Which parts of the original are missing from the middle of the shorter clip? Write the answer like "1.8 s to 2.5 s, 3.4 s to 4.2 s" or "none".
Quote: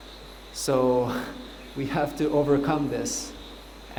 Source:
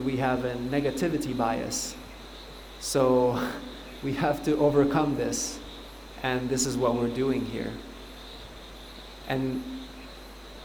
none